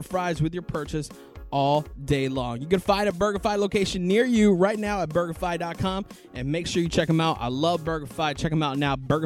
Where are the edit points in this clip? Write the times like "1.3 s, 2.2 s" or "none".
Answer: 5.7 s